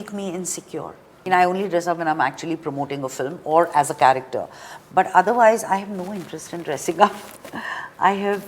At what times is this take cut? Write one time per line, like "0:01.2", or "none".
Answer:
0:01.3